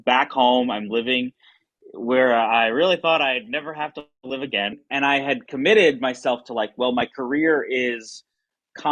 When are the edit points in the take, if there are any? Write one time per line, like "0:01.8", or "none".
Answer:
0:04.8